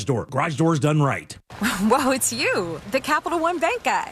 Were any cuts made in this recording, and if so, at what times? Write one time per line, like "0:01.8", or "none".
0:01.4